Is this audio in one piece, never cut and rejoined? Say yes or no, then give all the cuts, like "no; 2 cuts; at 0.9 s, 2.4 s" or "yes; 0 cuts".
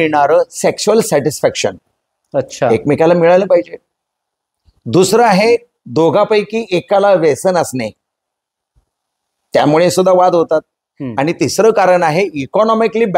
yes; 0 cuts